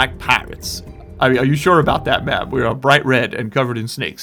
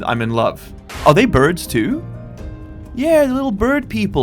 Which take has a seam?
second; 1 cut; at 1.0 s

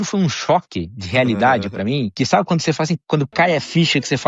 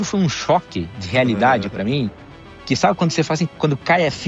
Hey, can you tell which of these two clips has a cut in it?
first; 1 cut; at 2.1 s

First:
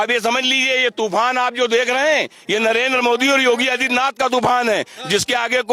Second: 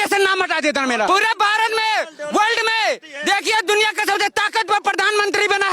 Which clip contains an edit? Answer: second; 1 cut; at 1.1 s

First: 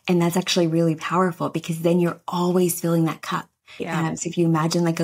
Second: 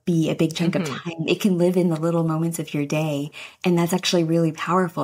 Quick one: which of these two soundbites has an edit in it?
first; 1 cut; at 3.9 s

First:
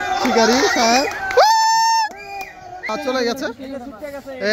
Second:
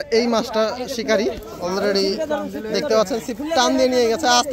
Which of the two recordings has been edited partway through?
first; 1 cut; at 2.9 s

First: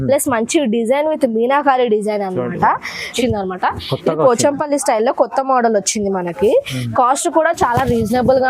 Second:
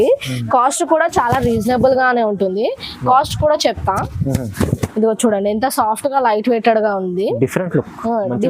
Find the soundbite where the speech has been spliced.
first; 1 cut; at 3.1 s

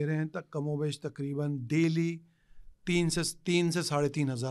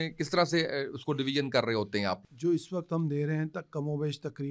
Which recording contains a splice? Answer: second; 1 cut; at 2.3 s

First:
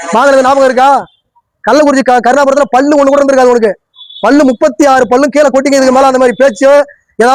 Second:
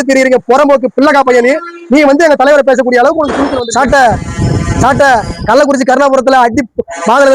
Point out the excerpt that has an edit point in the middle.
second; 1 cut; at 3.5 s

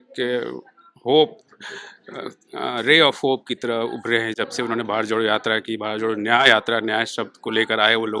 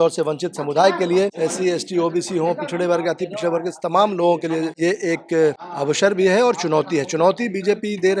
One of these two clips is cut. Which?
second; 3 cuts; at 1.3 s, 4.7 s, 5.7 s

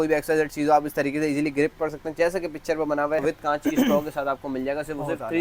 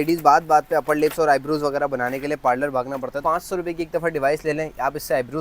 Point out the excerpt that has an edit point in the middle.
second; 1 cut; at 3.2 s

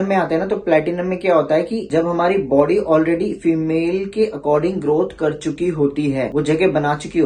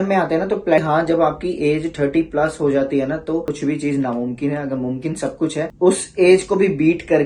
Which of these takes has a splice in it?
second; 3 cuts; at 0.8 s, 3.5 s, 5.7 s

